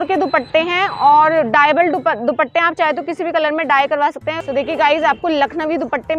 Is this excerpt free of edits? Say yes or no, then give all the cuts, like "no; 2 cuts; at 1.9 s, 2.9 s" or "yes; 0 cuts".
no; 1 cut; at 4.4 s